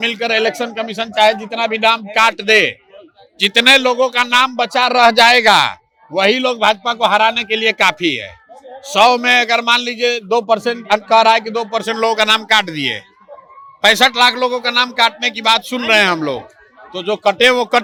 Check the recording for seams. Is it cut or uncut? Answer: uncut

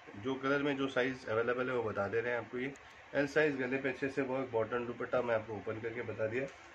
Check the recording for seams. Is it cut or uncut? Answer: uncut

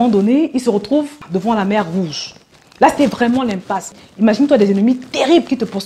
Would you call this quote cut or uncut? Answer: cut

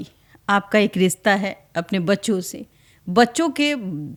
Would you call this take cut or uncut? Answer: uncut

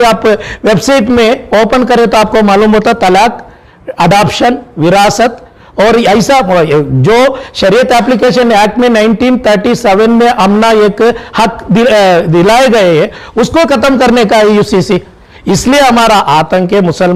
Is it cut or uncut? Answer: uncut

